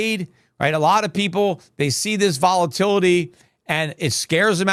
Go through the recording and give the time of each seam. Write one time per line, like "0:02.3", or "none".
none